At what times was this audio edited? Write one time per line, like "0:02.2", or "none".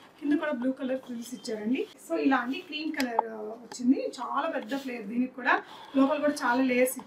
0:02.0